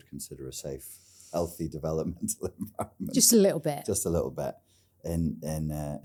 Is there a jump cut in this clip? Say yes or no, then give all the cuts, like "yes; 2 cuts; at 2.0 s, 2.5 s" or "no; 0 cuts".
no; 0 cuts